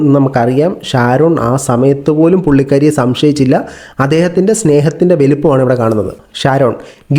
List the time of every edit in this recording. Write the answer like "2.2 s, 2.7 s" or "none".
6.2 s